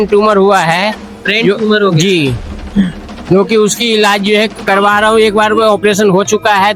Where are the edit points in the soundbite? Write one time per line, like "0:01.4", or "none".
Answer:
none